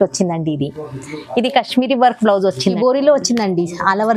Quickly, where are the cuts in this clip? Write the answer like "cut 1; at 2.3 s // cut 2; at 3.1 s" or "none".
none